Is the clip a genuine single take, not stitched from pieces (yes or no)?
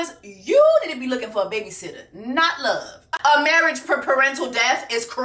no